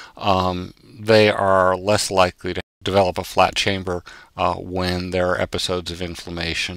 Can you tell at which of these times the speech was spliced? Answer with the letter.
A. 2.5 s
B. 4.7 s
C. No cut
A